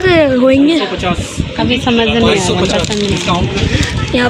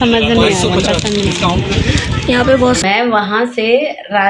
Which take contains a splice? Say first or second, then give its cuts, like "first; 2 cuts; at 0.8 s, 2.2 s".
second; 1 cut; at 3.4 s